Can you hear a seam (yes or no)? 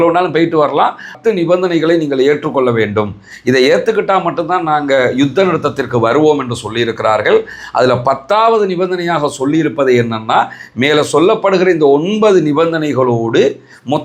yes